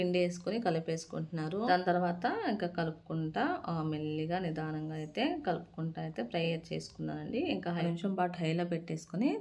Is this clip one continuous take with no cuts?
no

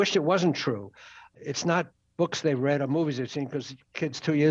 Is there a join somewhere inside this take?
yes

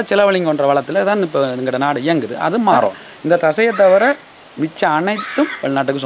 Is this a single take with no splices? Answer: no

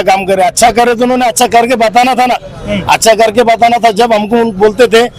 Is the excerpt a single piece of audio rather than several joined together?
yes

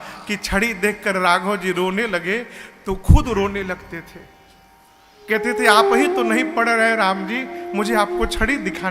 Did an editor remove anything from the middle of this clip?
no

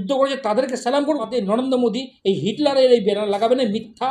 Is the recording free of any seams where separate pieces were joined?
no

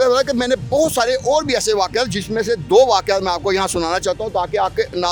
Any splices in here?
no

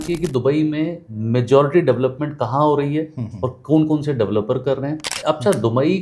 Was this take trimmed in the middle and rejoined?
yes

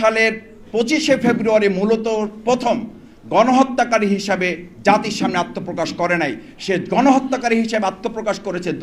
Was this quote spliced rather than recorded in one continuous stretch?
no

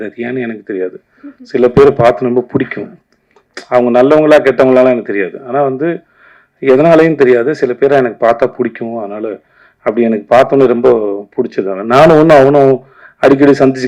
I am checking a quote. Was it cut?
no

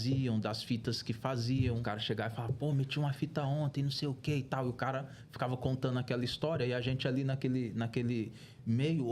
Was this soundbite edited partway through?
yes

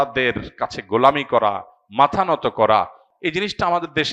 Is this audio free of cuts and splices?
no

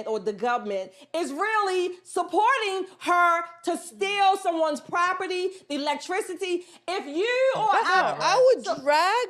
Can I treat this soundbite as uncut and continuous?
no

